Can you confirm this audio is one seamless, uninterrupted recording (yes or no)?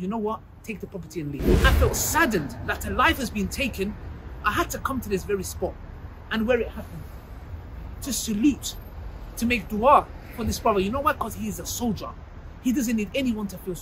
no